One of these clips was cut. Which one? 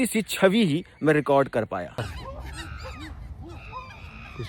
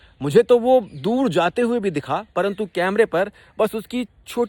first; 1 cut; at 2.0 s

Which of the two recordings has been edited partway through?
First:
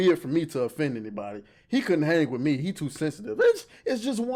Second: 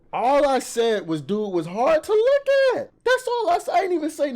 second; 1 cut; at 2.9 s

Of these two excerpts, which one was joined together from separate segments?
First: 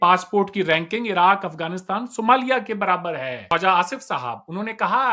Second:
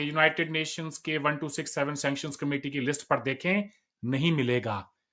first; 1 cut; at 3.4 s

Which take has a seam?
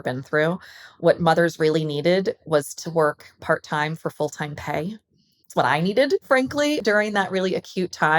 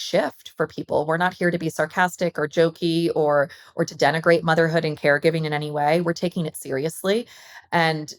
first; 1 cut; at 6.8 s

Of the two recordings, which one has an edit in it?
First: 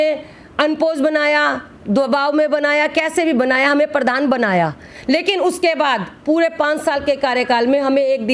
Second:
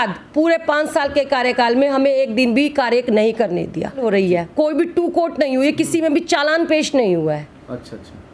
second; 1 cut; at 4.0 s

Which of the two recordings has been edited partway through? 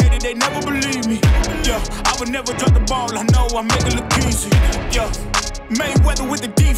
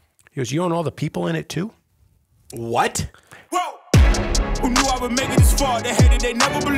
second; 1 cut; at 3.4 s

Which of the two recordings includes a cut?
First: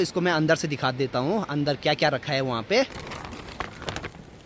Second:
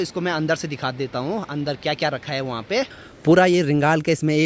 first; 1 cut; at 3.0 s

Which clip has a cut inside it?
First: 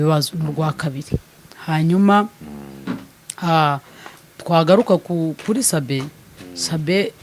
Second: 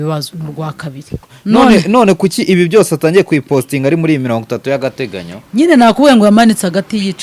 second; 1 cut; at 1.3 s

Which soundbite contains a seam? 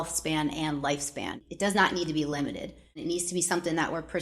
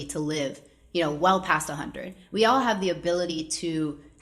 first; 2 cuts; at 1.4 s, 3.0 s

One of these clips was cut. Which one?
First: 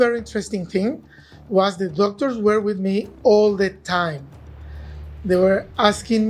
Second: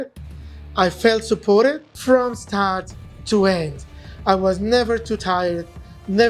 second; 1 cut; at 1.9 s

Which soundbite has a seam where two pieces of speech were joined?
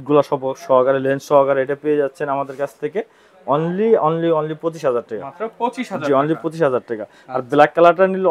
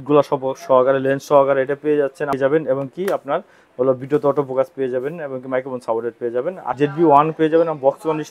second; 2 cuts; at 2.3 s, 6.7 s

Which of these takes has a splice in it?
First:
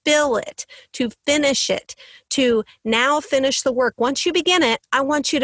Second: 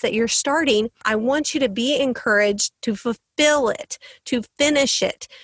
second; 1 cut; at 1.0 s

